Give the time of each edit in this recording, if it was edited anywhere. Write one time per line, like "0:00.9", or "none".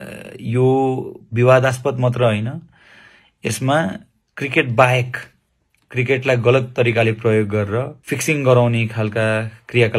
0:08.0